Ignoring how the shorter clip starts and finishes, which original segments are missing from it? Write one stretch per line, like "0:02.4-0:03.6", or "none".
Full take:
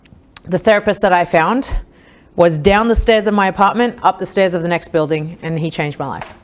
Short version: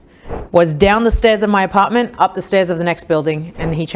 none